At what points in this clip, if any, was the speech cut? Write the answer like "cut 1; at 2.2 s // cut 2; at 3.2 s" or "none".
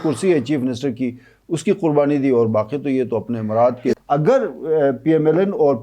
cut 1; at 4.0 s

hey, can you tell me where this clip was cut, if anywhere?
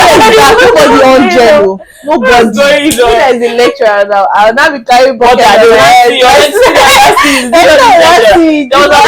cut 1; at 3.1 s

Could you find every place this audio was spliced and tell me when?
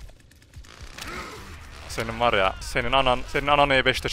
none

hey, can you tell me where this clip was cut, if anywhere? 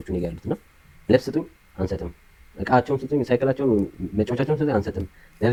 none

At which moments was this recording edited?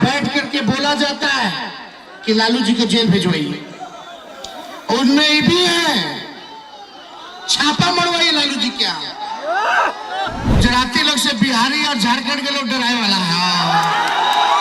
cut 1; at 10.6 s

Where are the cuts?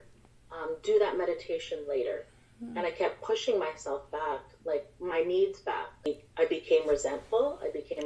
cut 1; at 6.0 s

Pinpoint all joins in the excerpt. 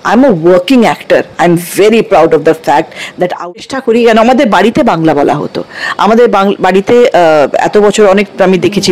cut 1; at 3.5 s

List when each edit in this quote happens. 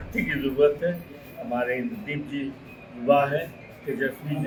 none

